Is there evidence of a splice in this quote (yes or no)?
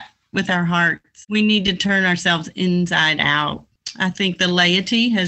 yes